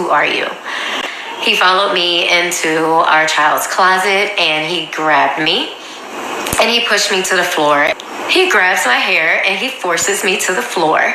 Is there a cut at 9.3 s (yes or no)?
no